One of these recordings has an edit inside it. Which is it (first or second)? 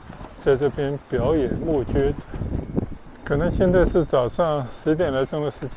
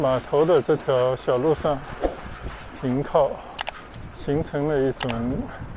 first